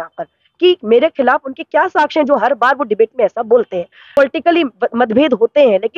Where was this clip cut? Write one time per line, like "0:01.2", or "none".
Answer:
0:04.1